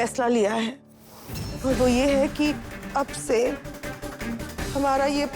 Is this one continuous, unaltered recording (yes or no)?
no